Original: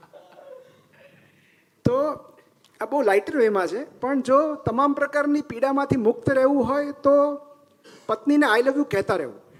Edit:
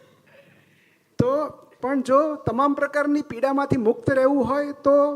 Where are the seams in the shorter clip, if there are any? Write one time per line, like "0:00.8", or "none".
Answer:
0:01.7